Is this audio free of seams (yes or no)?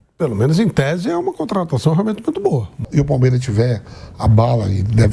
no